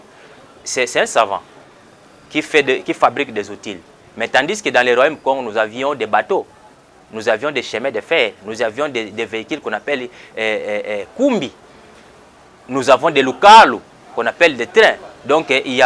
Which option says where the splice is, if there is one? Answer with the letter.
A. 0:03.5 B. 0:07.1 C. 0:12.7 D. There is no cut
D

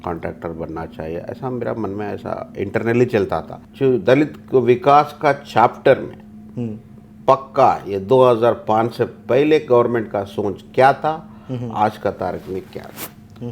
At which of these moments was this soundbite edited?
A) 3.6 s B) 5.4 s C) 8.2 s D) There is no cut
A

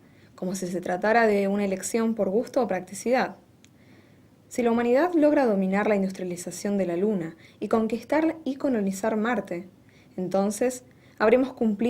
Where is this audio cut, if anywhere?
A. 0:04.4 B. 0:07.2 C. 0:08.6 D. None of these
B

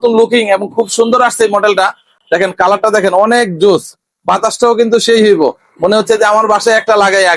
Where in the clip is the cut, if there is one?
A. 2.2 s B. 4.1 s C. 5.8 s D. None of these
A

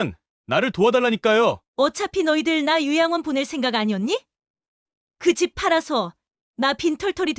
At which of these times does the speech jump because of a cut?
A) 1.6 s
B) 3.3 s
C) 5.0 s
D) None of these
A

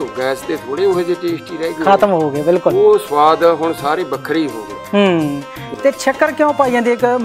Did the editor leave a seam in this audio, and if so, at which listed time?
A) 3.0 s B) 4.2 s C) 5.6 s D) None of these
D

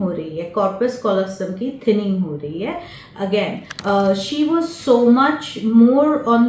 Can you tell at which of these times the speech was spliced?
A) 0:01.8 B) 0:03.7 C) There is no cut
B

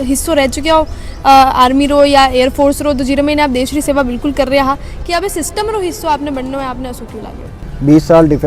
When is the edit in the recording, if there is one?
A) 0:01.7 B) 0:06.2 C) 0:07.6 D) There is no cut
C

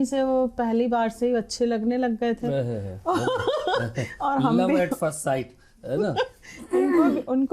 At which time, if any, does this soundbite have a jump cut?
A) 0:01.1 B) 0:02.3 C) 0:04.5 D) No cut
D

